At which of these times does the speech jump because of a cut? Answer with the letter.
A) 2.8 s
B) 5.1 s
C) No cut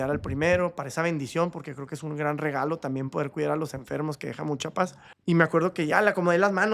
B